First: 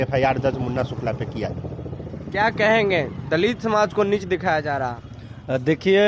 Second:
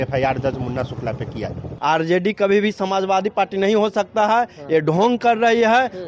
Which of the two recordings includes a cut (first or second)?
second